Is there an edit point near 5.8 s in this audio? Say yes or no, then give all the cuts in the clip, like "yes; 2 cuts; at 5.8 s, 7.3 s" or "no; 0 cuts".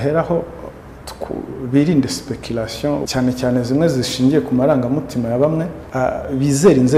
yes; 2 cuts; at 3.1 s, 5.8 s